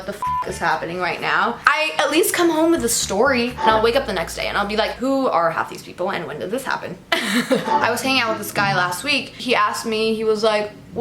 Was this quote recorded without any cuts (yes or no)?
no